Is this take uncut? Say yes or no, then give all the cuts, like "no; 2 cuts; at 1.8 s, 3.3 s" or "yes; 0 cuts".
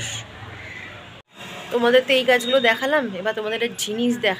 no; 1 cut; at 1.2 s